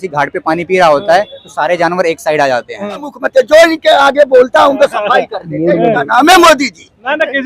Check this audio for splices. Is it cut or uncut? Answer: cut